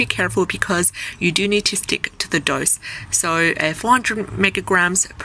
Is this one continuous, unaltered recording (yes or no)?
yes